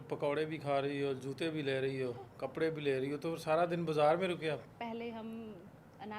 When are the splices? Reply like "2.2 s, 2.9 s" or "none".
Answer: 4.8 s